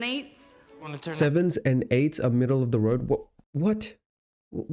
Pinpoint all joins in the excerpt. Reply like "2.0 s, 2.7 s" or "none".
3.4 s